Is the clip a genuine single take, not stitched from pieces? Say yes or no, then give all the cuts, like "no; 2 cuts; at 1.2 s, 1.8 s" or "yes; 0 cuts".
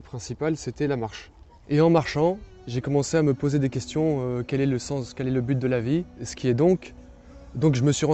no; 1 cut; at 6.3 s